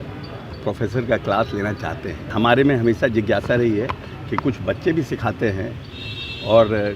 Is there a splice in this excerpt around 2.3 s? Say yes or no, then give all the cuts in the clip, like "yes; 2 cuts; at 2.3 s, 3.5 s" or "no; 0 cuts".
yes; 1 cut; at 2.3 s